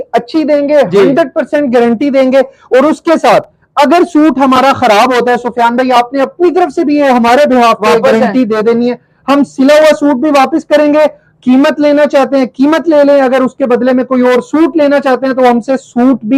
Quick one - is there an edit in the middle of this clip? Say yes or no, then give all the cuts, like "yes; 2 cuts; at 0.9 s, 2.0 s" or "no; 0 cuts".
no; 0 cuts